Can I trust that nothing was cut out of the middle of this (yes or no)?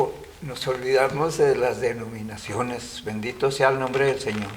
yes